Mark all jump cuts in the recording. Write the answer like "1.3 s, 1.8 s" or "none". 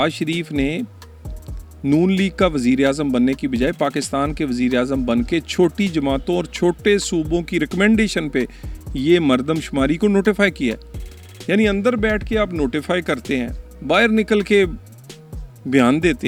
none